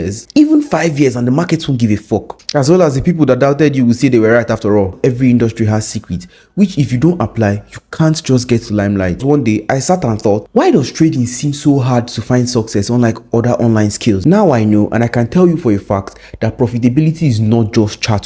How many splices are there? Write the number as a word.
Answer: three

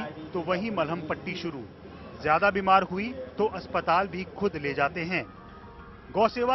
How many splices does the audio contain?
one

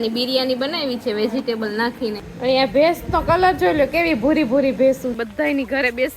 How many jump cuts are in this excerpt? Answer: two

